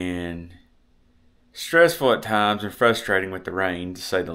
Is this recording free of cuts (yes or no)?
yes